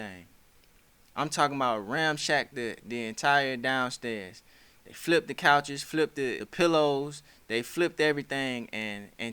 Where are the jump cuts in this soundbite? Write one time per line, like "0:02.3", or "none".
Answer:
0:06.4